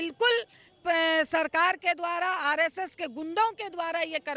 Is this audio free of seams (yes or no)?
yes